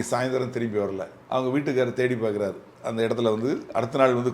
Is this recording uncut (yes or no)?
no